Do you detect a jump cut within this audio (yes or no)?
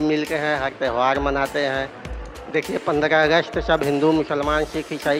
no